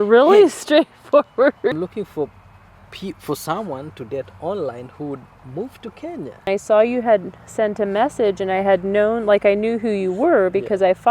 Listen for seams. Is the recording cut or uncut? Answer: cut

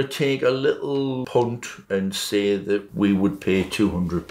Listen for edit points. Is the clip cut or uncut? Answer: cut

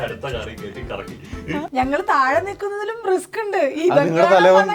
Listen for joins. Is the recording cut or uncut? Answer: cut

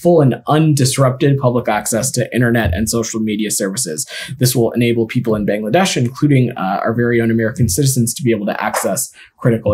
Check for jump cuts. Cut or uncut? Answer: uncut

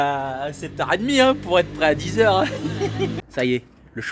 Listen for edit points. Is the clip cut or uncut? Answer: cut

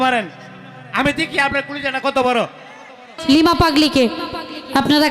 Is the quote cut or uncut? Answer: cut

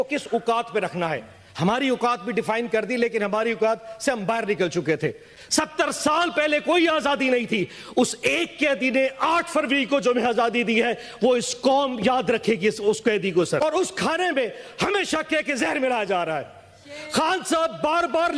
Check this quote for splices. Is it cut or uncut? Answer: cut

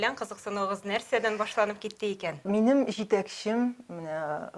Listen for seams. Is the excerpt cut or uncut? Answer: cut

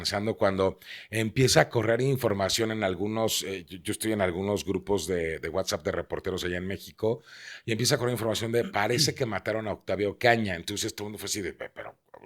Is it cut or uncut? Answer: uncut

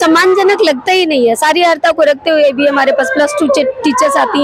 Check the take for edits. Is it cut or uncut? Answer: uncut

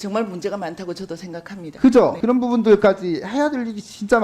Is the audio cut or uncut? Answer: cut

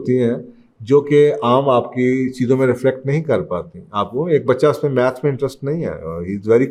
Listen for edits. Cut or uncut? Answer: uncut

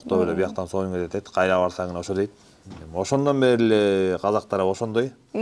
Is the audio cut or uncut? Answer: uncut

